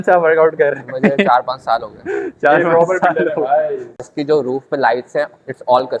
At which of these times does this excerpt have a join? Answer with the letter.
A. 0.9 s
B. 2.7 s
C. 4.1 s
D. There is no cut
C